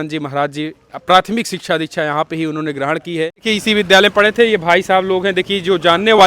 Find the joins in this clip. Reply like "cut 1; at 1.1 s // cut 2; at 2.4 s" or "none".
cut 1; at 3.5 s